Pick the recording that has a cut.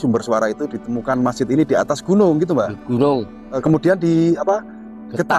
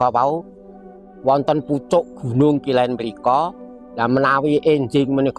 first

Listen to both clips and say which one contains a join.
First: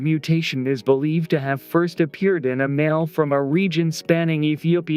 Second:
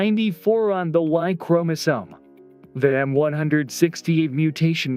first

